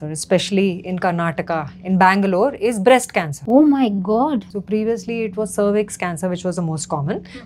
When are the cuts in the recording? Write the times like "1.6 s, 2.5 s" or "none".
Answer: none